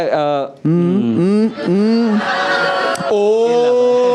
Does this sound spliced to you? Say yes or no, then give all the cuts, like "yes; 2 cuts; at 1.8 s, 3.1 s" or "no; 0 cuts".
no; 0 cuts